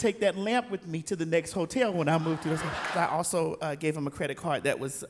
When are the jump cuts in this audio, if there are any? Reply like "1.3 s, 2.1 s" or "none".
2.9 s